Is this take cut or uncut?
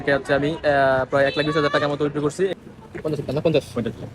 cut